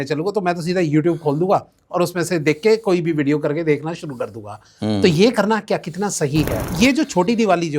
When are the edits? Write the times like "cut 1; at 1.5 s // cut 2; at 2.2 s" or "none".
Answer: cut 1; at 6.6 s